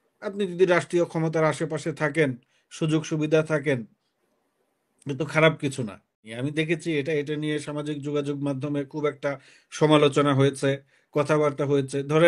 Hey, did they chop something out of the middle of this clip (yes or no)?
yes